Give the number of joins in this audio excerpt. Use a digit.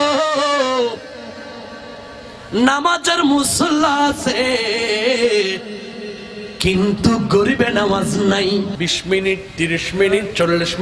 1